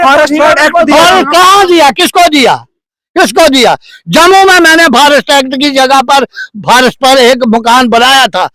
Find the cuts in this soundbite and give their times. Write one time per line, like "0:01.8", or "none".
none